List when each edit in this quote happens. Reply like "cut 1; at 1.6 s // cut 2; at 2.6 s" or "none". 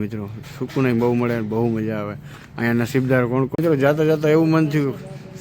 cut 1; at 3.5 s